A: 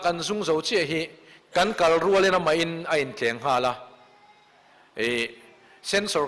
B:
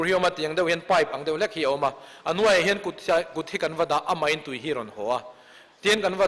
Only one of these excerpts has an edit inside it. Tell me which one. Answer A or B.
A